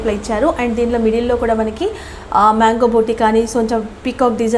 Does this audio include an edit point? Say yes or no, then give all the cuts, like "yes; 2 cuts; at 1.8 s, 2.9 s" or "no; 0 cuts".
no; 0 cuts